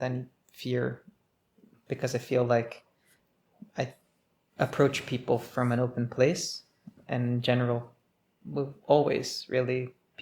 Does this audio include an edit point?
yes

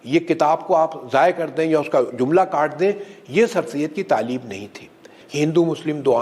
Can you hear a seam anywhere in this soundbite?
yes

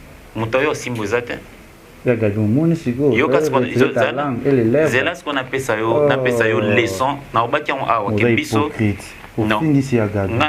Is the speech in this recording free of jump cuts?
yes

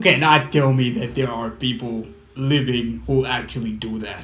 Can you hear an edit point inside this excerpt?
no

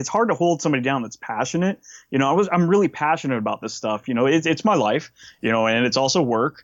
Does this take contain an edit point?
no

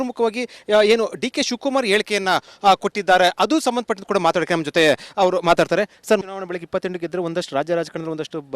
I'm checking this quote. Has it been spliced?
yes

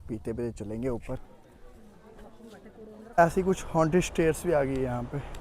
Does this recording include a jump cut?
yes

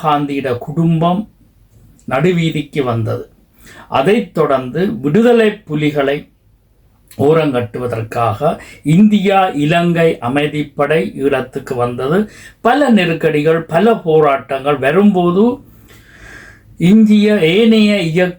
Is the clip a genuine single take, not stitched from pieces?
yes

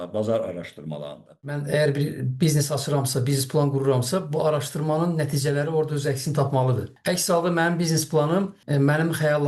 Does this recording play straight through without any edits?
no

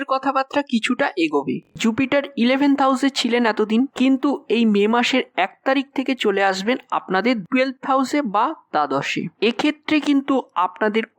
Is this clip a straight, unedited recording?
no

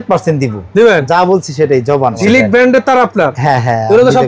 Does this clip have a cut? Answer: yes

